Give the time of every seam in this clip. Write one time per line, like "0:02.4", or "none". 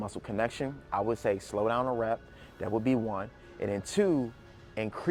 none

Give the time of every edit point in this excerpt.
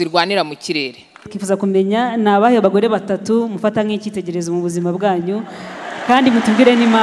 0:01.3

